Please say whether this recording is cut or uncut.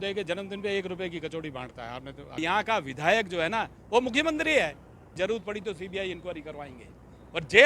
cut